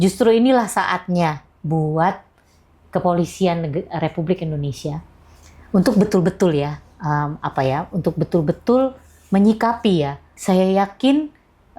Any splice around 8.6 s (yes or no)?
no